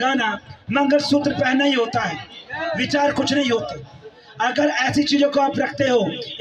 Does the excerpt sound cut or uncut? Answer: uncut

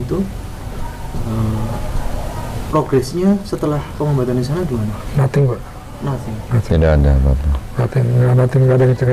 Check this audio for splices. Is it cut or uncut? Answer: uncut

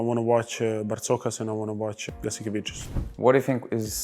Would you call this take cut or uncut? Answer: cut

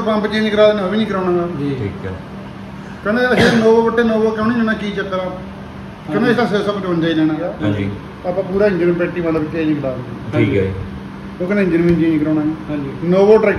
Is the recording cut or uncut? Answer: cut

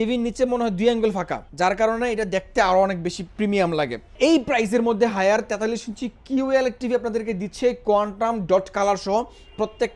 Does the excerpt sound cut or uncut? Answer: cut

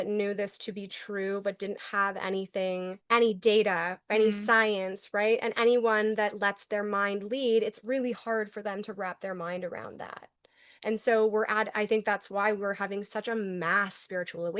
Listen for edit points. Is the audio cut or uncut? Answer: cut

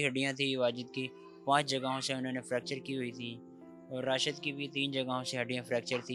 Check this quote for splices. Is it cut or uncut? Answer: uncut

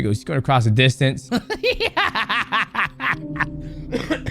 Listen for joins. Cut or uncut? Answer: cut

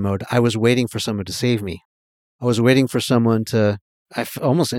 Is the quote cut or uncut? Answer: uncut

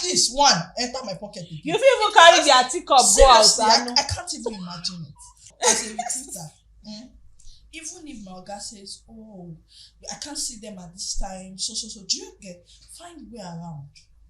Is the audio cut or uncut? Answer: cut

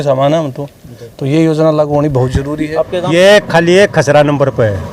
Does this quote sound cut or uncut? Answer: cut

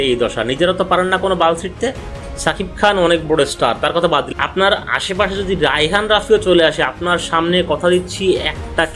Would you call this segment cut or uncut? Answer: cut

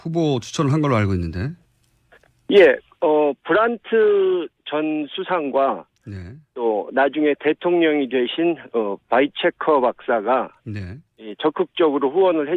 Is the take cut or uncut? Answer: cut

